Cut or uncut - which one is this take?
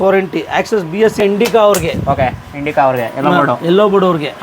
cut